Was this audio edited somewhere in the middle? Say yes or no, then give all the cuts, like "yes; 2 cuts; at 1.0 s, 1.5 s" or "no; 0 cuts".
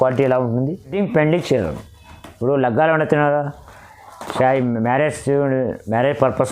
yes; 1 cut; at 0.9 s